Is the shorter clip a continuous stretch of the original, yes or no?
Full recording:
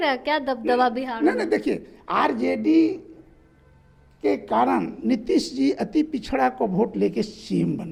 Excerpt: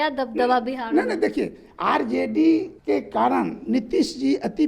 no